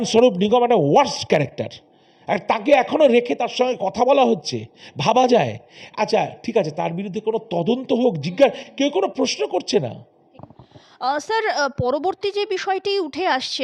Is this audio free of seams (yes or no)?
yes